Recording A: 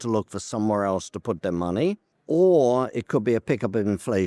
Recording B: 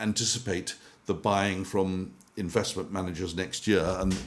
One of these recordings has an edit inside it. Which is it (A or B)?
A